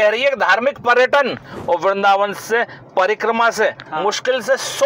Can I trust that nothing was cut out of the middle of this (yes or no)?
no